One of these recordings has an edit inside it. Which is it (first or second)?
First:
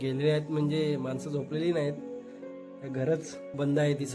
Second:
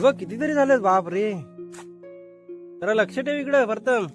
second